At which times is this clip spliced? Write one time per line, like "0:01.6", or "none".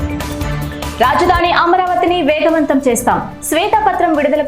0:00.9